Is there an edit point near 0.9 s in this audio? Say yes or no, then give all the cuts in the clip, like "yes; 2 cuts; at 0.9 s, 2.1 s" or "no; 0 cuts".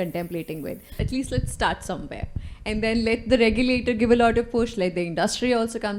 yes; 1 cut; at 0.9 s